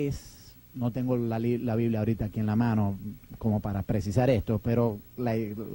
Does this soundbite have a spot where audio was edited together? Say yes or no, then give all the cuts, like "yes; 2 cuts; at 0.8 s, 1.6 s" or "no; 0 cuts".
yes; 1 cut; at 4.0 s